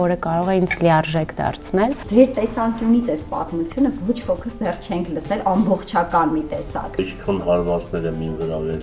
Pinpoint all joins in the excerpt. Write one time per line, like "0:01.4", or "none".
0:02.0
0:07.0